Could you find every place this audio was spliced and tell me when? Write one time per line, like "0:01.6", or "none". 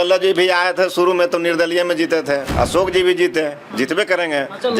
0:02.5